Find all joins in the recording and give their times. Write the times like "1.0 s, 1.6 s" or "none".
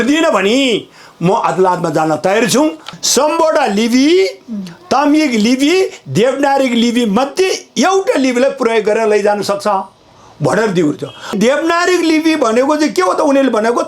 2.9 s, 11.3 s